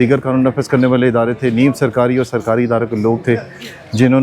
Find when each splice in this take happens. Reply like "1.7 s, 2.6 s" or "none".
none